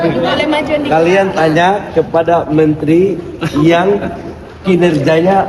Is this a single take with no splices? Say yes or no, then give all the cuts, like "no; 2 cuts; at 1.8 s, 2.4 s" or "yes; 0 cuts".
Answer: yes; 0 cuts